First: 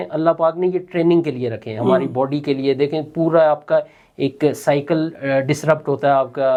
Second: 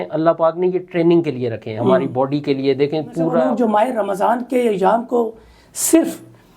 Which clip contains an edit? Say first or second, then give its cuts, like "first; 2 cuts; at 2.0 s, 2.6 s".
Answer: second; 1 cut; at 3.4 s